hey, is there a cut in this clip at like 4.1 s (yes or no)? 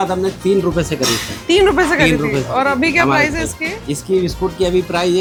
no